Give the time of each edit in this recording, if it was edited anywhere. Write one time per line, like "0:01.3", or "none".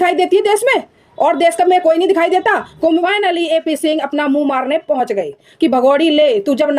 0:03.0
0:05.5

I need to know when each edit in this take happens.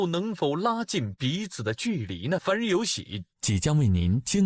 none

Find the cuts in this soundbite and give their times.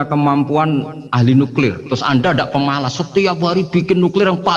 0:01.0

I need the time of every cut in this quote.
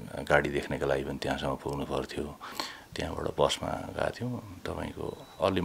0:02.5

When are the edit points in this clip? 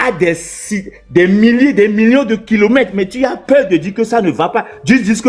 none

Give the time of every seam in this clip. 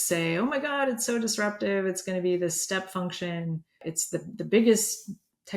0:03.8

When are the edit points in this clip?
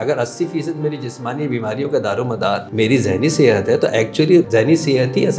0:02.7
0:04.5

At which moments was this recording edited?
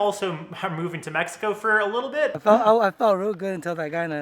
0:02.4

